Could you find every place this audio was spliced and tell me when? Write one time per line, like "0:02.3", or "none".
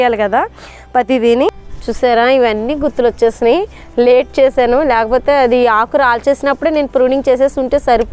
0:01.7

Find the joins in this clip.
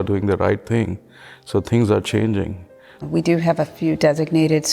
0:03.0

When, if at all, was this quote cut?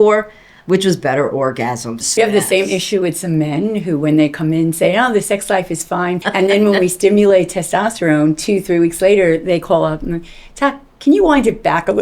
0:02.2
0:06.2

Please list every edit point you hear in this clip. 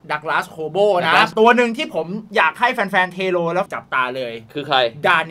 0:01.3
0:03.7

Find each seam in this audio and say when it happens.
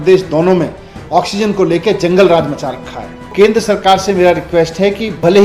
0:03.3

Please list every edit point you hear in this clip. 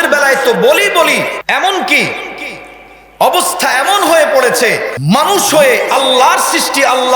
0:01.4
0:04.9

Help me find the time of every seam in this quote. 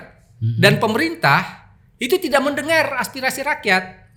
none

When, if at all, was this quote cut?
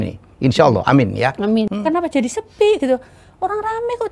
0:01.7

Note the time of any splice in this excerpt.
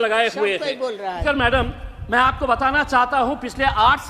0:01.2

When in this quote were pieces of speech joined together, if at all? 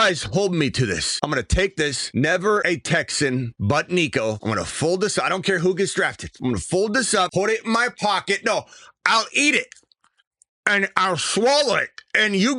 0:01.1
0:02.0
0:02.6
0:03.5
0:04.4
0:06.2
0:07.3

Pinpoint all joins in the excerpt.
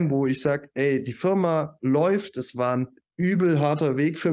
none

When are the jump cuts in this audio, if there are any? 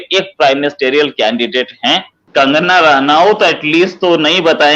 0:02.2

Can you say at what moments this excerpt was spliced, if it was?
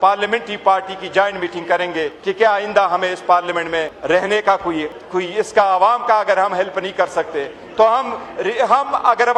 0:02.1
0:03.9
0:05.0

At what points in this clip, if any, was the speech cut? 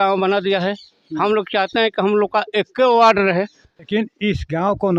0:03.9

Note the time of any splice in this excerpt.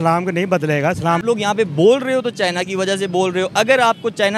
0:01.2

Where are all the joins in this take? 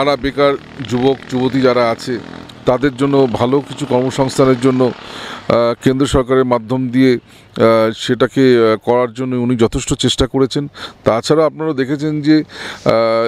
none

